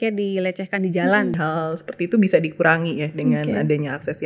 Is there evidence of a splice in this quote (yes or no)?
yes